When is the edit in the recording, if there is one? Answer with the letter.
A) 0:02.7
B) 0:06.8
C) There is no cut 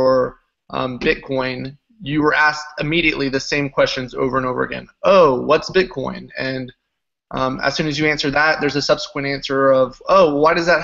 A